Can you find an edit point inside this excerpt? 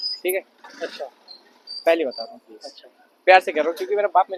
no; 0 cuts

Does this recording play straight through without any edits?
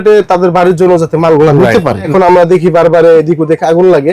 no; 1 cut; at 2.1 s

